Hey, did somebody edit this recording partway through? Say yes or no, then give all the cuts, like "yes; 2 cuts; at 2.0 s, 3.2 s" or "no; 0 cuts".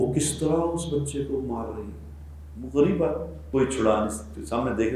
yes; 1 cut; at 3.3 s